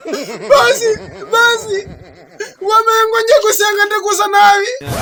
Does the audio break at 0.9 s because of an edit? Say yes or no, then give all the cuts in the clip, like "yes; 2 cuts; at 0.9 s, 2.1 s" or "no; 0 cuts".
no; 0 cuts